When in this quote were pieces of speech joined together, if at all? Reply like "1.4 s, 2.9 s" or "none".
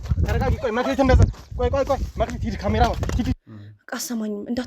3.4 s